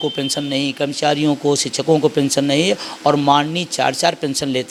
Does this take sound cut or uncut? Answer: uncut